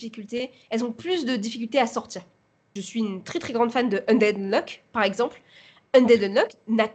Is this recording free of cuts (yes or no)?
no